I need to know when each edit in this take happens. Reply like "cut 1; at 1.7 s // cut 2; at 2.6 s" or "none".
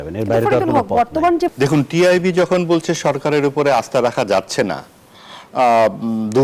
cut 1; at 1.5 s